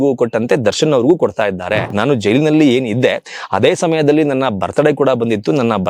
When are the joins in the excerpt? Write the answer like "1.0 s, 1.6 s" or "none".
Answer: 1.9 s